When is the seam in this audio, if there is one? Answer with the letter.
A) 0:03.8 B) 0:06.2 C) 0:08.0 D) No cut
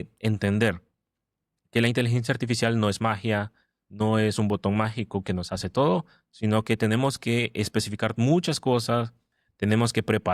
D